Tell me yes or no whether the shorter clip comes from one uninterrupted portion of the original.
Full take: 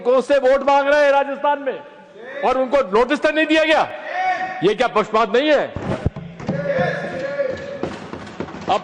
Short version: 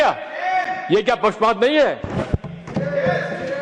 yes